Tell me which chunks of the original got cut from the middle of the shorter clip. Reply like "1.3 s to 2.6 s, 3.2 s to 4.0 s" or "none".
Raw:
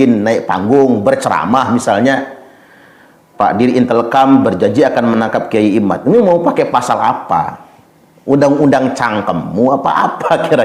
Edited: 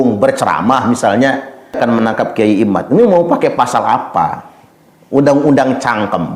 2.6 s to 4.9 s